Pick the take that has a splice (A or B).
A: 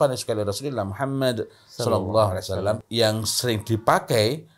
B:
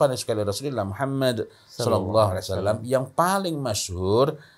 A